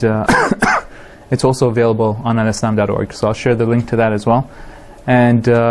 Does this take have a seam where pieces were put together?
yes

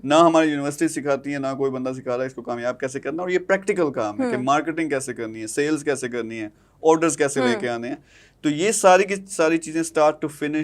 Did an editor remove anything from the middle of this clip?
no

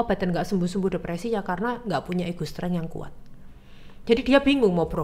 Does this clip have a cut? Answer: no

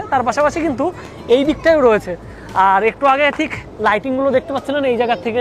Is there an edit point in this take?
no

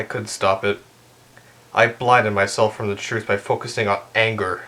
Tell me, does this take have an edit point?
no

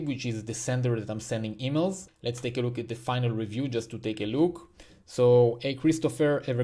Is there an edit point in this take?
yes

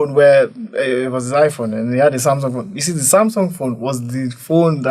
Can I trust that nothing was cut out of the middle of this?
yes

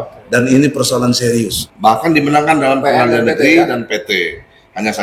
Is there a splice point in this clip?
yes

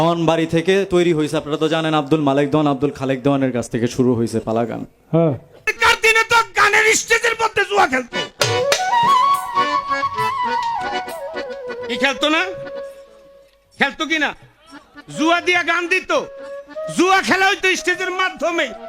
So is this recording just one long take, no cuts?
no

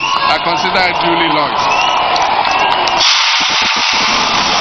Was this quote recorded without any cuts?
yes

